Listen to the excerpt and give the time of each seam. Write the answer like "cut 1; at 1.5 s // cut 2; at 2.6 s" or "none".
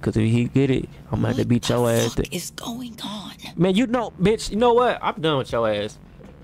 none